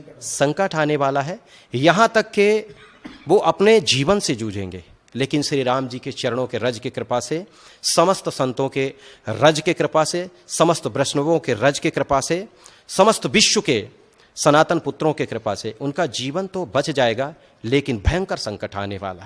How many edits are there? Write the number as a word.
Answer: zero